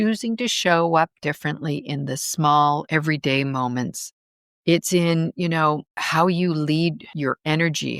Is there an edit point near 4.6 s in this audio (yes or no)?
no